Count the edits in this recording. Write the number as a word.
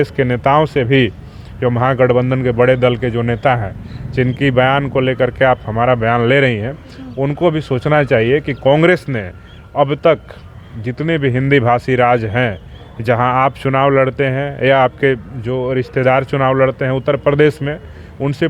zero